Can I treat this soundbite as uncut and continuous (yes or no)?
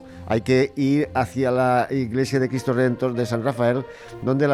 yes